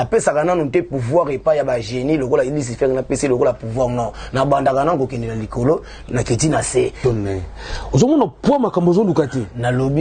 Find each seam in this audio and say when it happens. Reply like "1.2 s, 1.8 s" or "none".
7.0 s